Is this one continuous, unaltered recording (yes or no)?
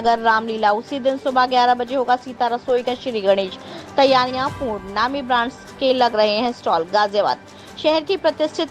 yes